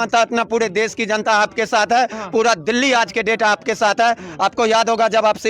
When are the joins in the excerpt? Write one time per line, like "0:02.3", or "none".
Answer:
none

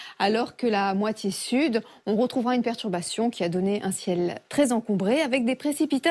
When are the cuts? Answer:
none

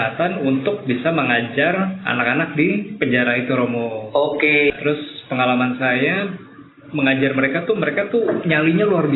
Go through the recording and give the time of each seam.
0:04.7

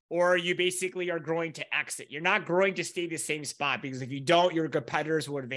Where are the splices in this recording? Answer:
none

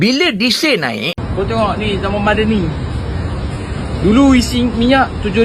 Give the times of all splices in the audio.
0:01.2

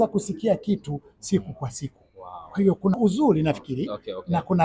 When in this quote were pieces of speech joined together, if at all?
0:03.0

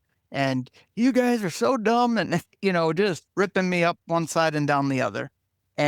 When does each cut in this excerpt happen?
0:03.2

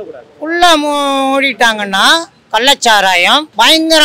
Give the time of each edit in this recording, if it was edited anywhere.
0:02.3

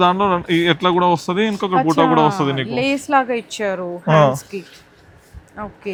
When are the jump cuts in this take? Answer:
none

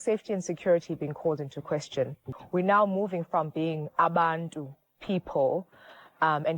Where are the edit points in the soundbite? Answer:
0:02.2

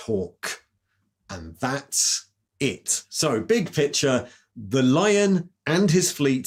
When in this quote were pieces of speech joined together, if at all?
none

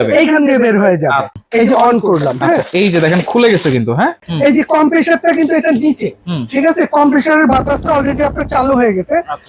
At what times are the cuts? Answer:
0:01.4
0:04.3

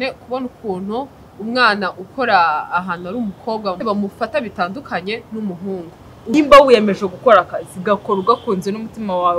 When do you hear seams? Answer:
0:03.8
0:06.3

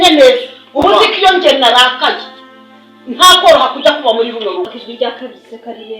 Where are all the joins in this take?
0:04.8

